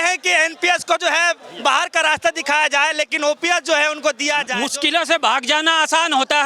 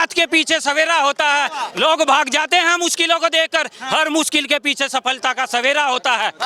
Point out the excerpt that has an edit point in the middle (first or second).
first